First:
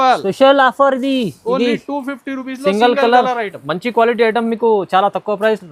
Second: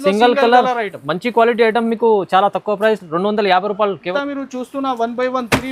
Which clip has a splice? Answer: second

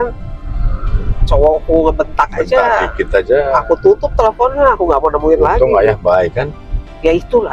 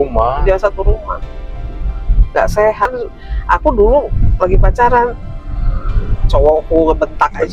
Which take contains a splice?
second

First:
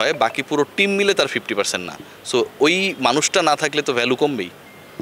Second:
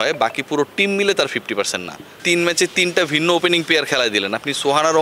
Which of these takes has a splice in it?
second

